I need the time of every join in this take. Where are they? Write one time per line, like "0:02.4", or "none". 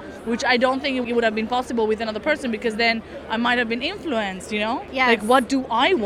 0:01.1
0:04.9